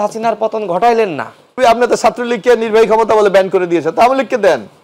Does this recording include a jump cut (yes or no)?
yes